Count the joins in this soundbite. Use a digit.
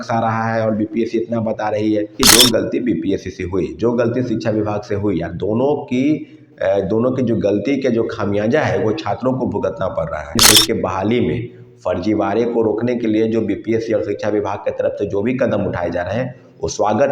2